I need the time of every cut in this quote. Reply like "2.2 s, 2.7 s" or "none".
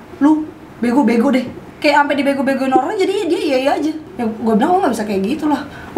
1.6 s, 4.1 s